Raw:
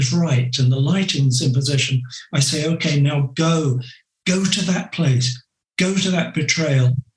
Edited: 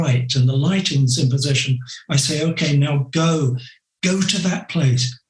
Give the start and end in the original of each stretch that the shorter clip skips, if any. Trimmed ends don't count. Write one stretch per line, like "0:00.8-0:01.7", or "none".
none